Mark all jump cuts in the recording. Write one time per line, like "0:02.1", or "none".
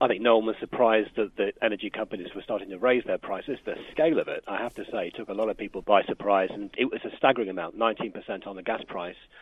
0:05.8
0:06.8